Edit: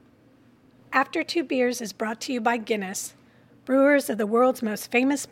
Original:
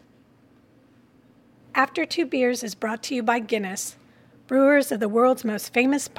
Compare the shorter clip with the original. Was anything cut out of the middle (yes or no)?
yes